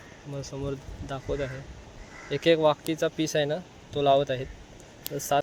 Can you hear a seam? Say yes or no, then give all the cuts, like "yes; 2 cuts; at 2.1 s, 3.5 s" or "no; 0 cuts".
no; 0 cuts